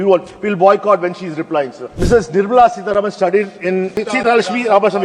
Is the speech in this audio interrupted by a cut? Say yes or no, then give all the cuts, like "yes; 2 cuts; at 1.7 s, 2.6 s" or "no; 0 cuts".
yes; 2 cuts; at 1.8 s, 4.0 s